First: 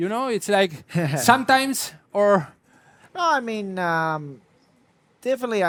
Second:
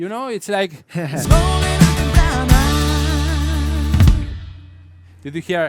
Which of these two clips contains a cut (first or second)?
second